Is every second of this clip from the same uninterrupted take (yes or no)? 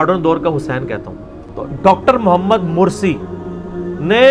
no